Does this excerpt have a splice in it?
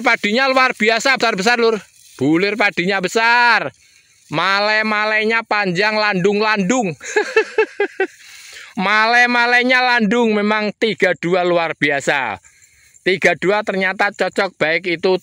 yes; 1 cut; at 1.2 s

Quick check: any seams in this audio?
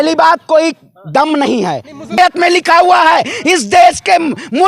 yes; 1 cut; at 2.2 s

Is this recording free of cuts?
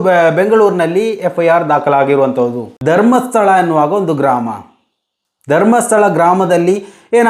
no; 1 cut; at 2.7 s

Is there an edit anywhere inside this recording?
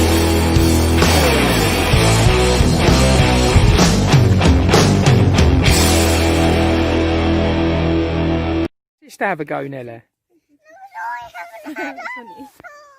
yes; 1 cut; at 8.7 s

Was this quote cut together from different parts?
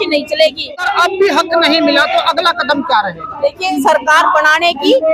yes; 2 cuts; at 0.8 s, 3.6 s

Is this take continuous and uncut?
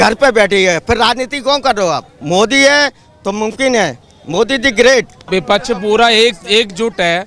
no; 2 cuts; at 2.1 s, 5.2 s

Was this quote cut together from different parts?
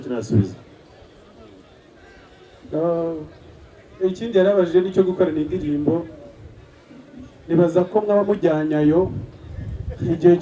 no; 0 cuts

